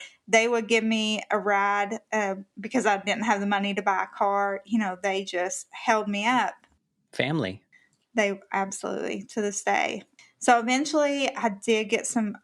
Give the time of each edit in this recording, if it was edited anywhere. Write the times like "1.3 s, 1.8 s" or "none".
none